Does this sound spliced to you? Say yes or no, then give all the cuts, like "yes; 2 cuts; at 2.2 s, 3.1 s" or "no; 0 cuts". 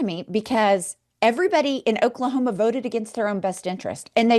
no; 0 cuts